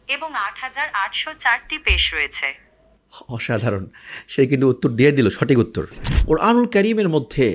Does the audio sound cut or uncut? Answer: cut